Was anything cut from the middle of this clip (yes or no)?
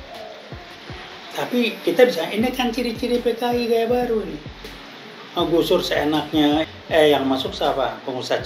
yes